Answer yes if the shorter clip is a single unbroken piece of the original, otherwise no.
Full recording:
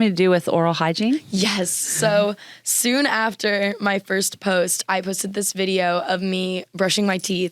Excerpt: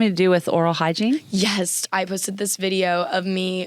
no